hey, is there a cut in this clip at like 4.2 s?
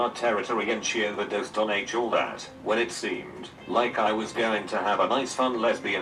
no; 0 cuts

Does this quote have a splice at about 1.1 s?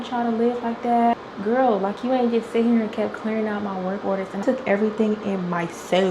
yes; 2 cuts; at 1.1 s, 4.4 s

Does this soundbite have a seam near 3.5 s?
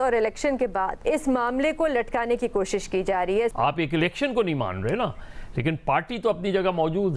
yes; 2 cuts; at 1.0 s, 3.5 s

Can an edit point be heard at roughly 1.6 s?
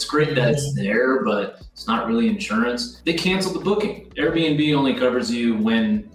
no; 2 cuts; at 2.9 s, 4.0 s

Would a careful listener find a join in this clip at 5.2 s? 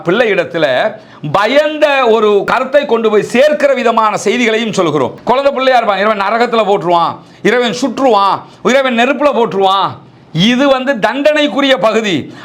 yes; 2 cuts; at 2.5 s, 5.2 s

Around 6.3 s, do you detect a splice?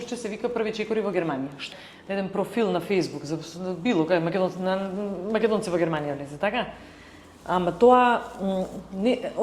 no; 1 cut; at 1.6 s

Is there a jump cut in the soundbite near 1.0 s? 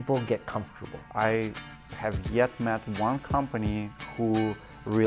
yes; 1 cut; at 1.0 s

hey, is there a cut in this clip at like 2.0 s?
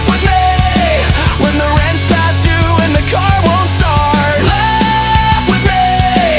no; 0 cuts

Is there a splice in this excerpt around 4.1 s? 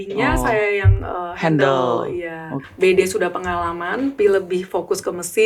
yes; 2 cuts; at 2.6 s, 4.1 s

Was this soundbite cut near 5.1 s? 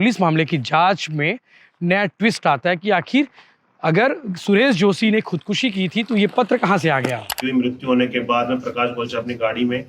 no; 1 cut; at 7.3 s

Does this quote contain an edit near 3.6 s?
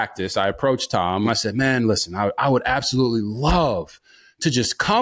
no; 1 cut; at 1.3 s

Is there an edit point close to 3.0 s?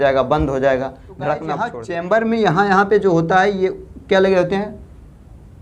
no; 1 cut; at 1.8 s

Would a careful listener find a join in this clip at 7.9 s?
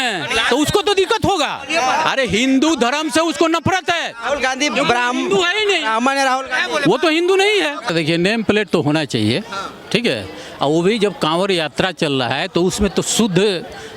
yes; 1 cut; at 7.9 s

